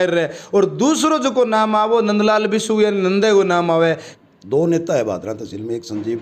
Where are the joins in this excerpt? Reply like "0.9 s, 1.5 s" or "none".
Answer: 4.1 s